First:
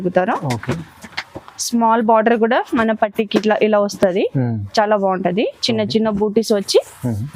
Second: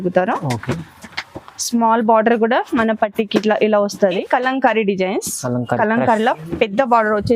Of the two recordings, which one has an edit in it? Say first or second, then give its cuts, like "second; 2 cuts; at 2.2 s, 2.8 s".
second; 1 cut; at 4.0 s